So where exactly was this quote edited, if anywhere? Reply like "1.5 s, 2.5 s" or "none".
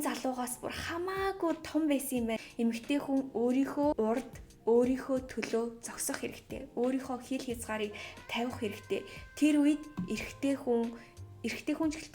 2.4 s, 3.9 s